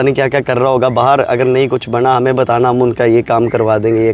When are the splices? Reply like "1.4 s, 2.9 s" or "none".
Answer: none